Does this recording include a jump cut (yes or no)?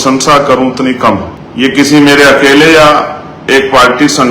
yes